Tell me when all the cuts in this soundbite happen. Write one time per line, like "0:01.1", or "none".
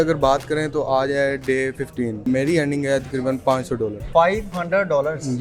0:02.3
0:04.0